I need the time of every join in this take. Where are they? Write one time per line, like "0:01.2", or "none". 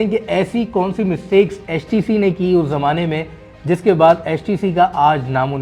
none